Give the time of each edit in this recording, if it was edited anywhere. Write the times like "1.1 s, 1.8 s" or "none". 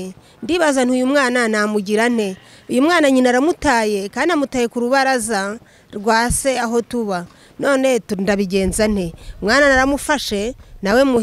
none